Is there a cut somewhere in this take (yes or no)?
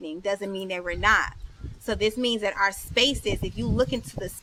no